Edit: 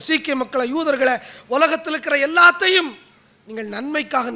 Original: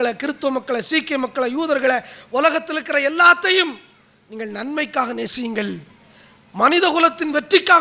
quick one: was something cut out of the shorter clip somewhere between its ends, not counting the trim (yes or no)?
no